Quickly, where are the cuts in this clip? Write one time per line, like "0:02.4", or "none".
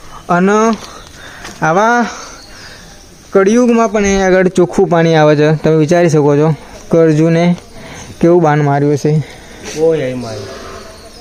none